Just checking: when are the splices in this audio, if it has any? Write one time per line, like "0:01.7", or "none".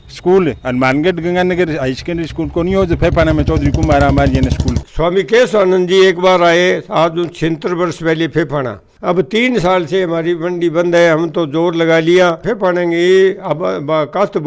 0:04.7
0:08.9
0:12.4